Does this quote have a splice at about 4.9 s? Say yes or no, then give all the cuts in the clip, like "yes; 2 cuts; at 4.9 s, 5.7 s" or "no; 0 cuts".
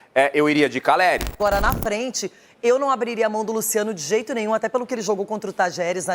no; 1 cut; at 1.4 s